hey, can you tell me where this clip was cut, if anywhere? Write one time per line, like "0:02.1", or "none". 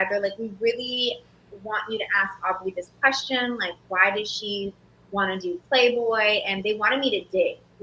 none